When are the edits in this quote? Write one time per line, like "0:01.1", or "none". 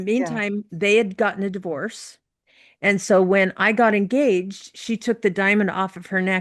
none

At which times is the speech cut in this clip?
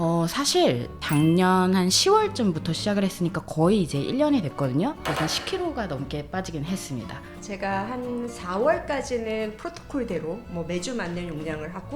0:01.0
0:07.3

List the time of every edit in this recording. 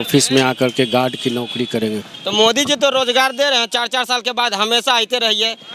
0:02.1

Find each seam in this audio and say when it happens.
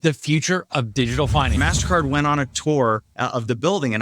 0:01.6
0:03.1

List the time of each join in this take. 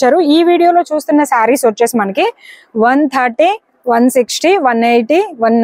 none

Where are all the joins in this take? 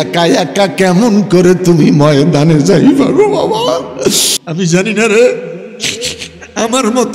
0:04.3

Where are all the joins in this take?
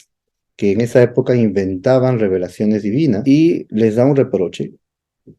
0:03.2

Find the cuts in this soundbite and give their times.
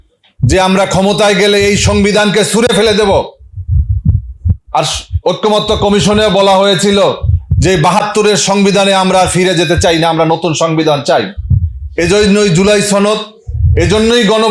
none

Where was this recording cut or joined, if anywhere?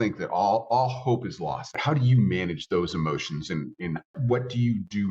0:01.8
0:04.1

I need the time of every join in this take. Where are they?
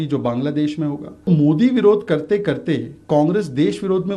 0:01.3

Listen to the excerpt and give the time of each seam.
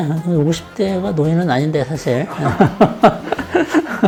none

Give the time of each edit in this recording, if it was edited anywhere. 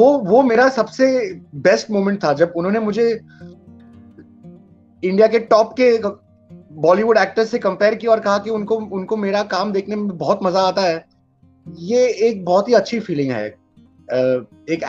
none

